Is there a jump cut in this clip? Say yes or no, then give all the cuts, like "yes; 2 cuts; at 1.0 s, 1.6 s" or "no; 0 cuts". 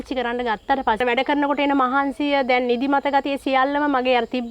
yes; 1 cut; at 1.0 s